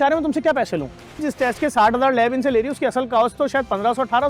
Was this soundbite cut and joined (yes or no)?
yes